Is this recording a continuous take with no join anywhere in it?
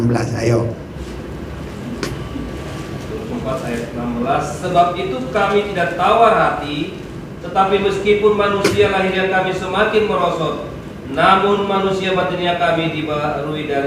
no; 1 cut; at 1.0 s

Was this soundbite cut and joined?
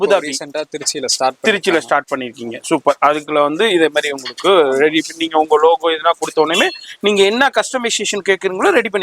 no; 0 cuts

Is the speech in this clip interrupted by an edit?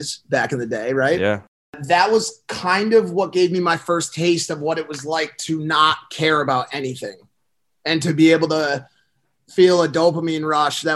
no; 0 cuts

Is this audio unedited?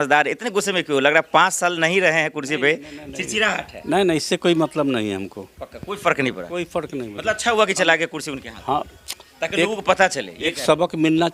yes; 0 cuts

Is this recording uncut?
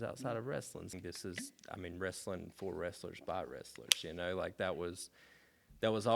no; 1 cut; at 0.9 s

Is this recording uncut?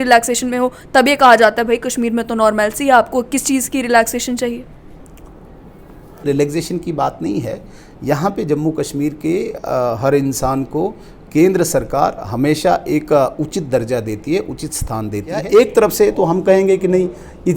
no; 2 cuts; at 6.2 s, 15.4 s

